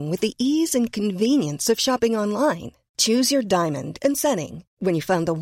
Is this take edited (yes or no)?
no